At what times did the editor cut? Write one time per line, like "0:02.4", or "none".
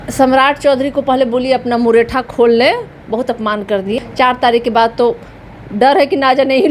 0:04.1